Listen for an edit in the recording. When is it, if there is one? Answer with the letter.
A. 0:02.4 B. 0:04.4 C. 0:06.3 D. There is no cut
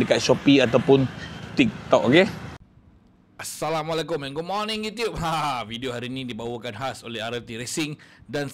A